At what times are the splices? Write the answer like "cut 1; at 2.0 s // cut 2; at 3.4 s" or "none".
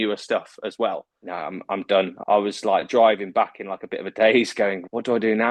cut 1; at 1.0 s // cut 2; at 2.1 s